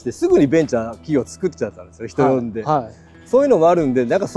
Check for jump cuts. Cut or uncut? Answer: uncut